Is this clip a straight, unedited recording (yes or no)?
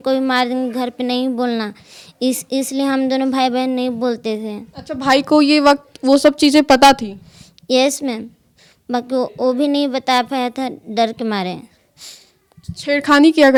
yes